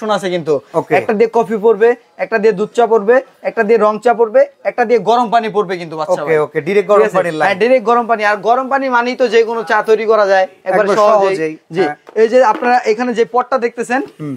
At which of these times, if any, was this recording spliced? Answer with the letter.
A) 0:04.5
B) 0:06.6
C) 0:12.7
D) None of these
D